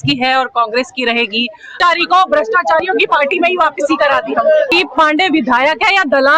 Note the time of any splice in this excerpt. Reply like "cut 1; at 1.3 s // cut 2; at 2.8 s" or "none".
cut 1; at 1.8 s // cut 2; at 4.7 s